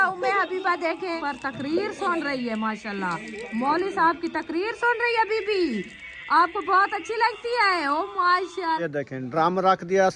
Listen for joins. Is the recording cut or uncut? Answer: cut